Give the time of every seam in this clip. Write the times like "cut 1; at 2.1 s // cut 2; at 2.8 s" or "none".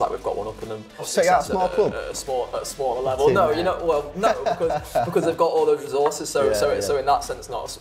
cut 1; at 1.1 s